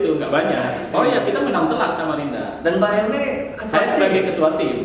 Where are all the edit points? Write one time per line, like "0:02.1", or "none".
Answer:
0:00.9